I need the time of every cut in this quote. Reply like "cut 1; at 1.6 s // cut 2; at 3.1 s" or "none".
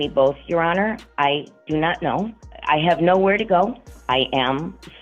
cut 1; at 2.5 s // cut 2; at 3.9 s